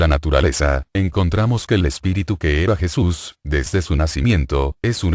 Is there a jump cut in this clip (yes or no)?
yes